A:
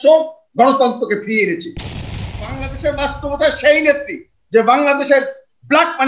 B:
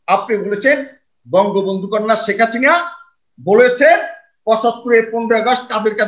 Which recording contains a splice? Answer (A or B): A